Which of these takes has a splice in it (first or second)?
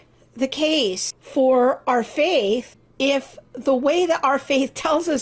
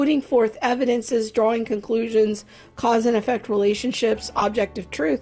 first